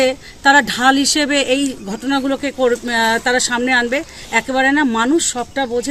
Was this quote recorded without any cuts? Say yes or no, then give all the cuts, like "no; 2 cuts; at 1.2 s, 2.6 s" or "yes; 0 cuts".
yes; 0 cuts